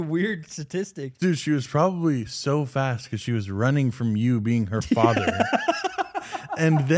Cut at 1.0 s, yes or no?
yes